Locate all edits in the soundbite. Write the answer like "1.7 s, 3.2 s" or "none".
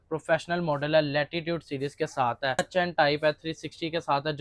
2.7 s